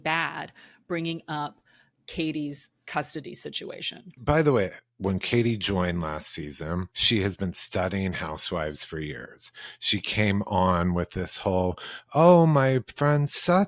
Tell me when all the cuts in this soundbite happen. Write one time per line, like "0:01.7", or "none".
0:04.1
0:04.8
0:06.9